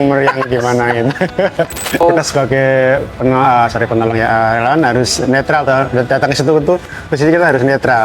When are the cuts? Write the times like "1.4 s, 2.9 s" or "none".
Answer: 2.0 s